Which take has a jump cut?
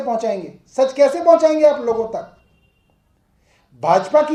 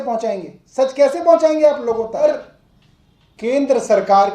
second; 1 cut; at 2.2 s

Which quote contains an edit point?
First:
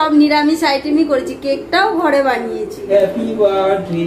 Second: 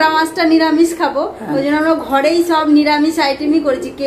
first; 1 cut; at 2.9 s

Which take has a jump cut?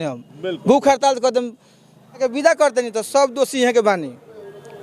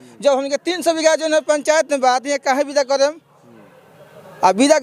first; 1 cut; at 2.2 s

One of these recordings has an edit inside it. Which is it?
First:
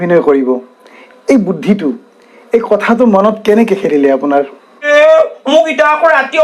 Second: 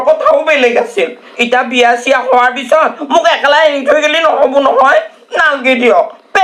first; 1 cut; at 4.8 s

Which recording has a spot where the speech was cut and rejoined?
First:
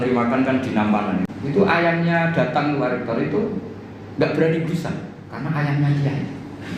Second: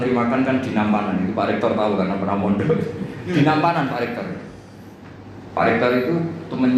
first; 1 cut; at 1.3 s

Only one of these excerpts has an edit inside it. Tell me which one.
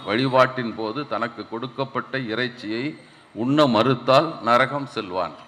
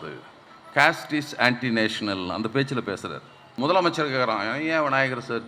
second; 1 cut; at 3.4 s

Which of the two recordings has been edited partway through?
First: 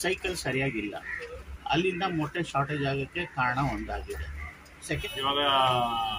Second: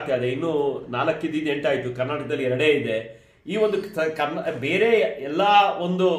first; 1 cut; at 5.0 s

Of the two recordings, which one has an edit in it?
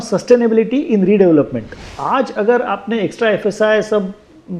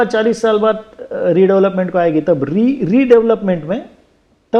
first; 1 cut; at 1.9 s

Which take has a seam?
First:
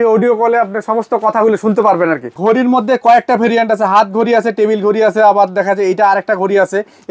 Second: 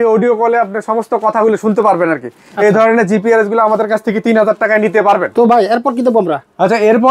first; 1 cut; at 2.3 s

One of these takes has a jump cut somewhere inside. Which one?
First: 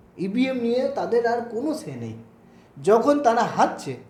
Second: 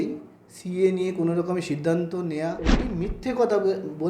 second; 1 cut; at 2.8 s

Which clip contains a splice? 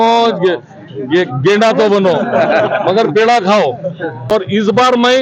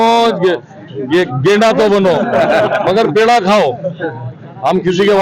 first; 1 cut; at 4.3 s

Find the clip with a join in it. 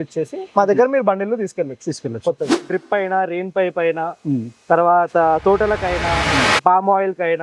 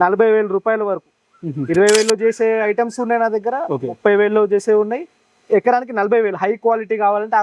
first; 1 cut; at 2.6 s

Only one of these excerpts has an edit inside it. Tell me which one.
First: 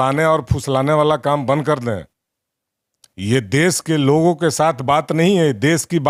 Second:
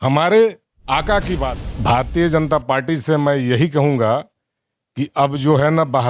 second; 1 cut; at 1.6 s

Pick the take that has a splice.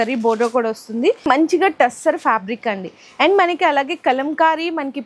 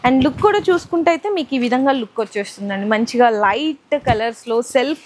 first; 1 cut; at 1.3 s

